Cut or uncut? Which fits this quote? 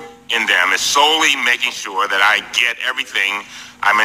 cut